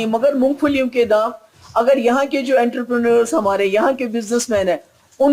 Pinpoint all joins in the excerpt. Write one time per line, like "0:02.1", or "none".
none